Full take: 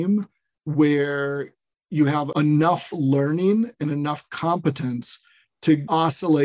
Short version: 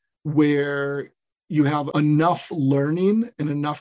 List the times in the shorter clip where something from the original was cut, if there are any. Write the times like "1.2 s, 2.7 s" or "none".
none